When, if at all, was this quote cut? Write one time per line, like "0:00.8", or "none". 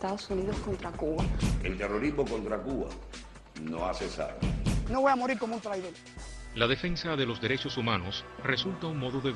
0:01.2

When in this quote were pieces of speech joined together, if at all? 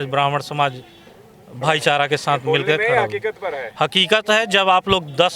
none

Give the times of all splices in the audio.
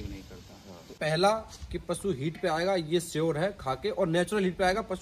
0:00.9

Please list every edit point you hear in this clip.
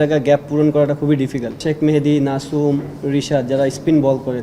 0:01.5

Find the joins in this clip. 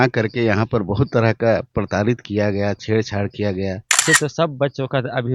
0:04.0

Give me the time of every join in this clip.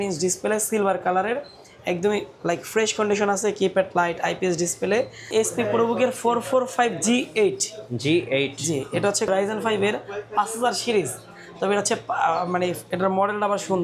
0:05.3

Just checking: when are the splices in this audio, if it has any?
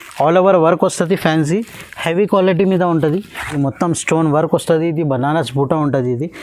0:03.4

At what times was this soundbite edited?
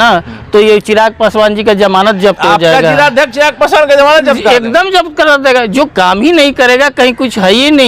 none

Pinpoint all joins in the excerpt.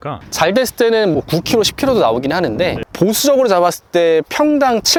none

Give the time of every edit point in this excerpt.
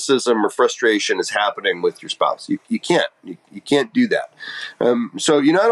none

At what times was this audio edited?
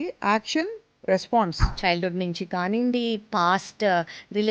0:01.6

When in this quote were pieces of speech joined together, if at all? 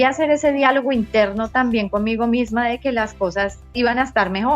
0:03.6

